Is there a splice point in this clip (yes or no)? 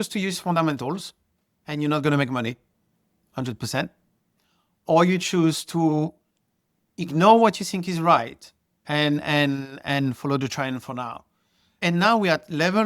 yes